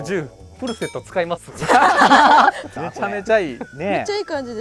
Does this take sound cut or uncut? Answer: uncut